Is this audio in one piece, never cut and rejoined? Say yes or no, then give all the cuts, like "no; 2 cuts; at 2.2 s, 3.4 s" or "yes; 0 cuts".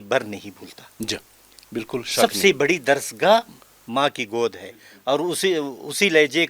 yes; 0 cuts